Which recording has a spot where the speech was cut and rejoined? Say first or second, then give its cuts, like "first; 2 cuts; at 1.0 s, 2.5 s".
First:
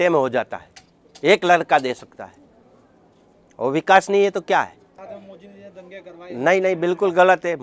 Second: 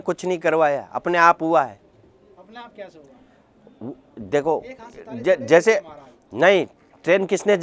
first; 1 cut; at 5.0 s